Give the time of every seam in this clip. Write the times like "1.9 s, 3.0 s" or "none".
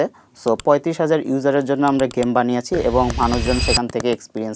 none

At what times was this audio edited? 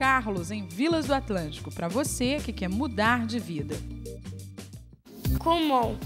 5.1 s

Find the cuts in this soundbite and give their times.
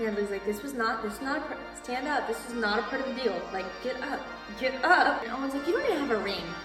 5.3 s

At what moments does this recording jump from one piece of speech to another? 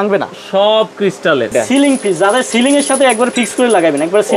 1.5 s

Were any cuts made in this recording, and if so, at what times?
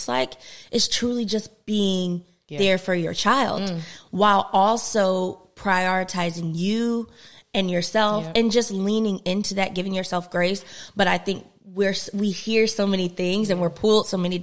none

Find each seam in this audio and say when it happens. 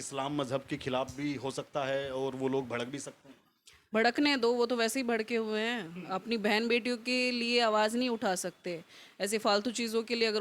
none

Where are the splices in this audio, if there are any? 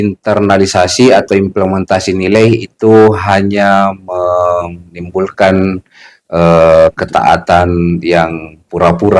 none

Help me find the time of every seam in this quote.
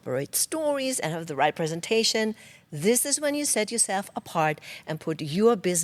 none

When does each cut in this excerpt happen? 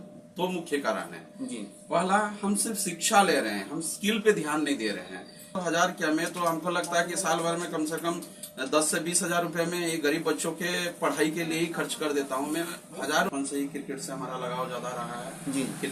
5.5 s, 13.3 s

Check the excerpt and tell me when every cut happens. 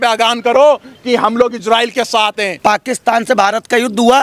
2.5 s

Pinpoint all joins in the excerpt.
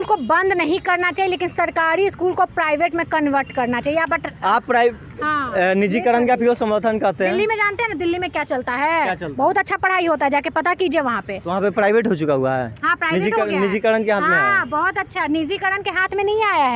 none

